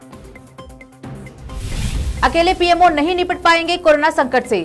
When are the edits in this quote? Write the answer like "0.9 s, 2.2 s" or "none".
1.5 s